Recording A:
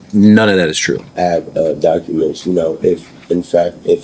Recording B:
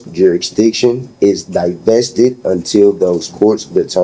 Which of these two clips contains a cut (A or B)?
A